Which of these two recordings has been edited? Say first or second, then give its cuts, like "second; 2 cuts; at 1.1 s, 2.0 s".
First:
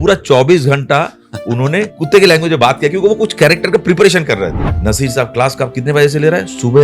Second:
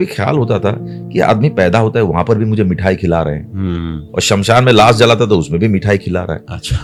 first; 2 cuts; at 2.0 s, 4.7 s